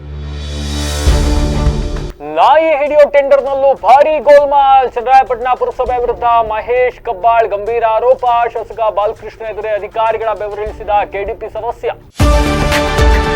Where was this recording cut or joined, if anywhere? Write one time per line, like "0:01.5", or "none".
0:12.1